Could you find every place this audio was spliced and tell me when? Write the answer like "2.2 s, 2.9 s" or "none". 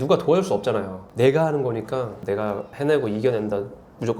1.1 s